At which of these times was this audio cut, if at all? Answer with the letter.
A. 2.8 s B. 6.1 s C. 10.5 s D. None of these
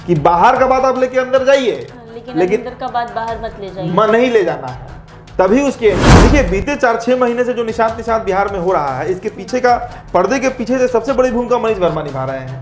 B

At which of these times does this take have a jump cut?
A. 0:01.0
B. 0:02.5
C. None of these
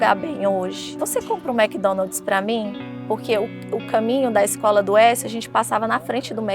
A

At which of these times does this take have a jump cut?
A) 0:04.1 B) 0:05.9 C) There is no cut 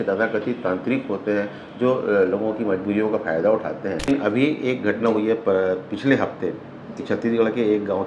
A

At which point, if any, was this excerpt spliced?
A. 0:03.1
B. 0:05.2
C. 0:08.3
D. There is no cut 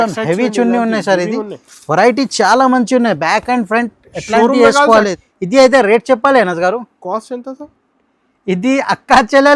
B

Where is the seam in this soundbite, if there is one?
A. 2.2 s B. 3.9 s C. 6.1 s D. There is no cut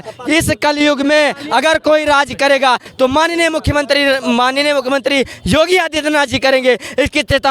D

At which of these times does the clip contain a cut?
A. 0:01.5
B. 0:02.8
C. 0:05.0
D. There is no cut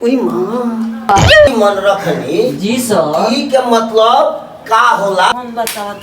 A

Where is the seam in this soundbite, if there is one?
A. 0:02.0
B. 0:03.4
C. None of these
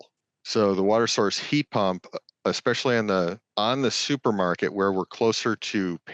B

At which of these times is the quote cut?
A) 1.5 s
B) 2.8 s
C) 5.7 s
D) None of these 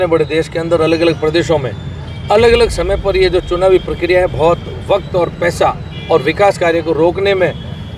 D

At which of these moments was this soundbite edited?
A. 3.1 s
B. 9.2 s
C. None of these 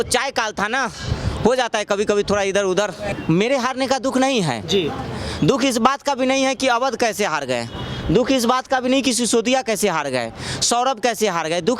A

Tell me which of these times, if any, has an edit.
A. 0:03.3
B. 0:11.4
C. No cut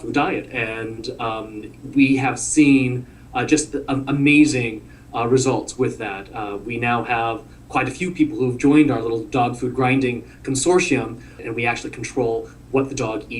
B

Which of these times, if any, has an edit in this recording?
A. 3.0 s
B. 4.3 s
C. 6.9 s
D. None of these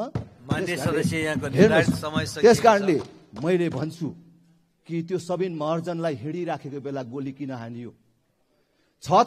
D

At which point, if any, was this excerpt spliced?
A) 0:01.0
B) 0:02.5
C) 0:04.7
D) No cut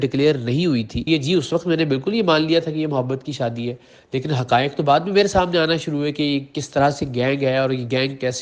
A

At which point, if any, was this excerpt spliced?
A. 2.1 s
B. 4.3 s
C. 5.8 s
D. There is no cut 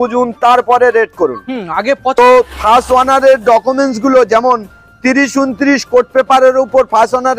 A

